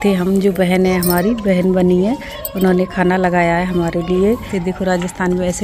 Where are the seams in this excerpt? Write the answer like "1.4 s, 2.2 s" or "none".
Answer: 4.5 s